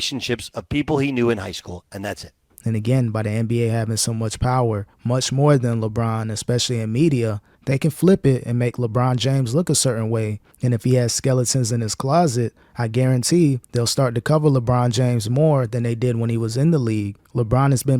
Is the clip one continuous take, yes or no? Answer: no